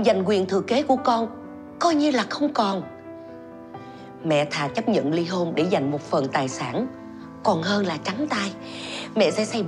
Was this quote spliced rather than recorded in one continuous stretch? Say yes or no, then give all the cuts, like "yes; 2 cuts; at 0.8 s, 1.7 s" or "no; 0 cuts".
no; 0 cuts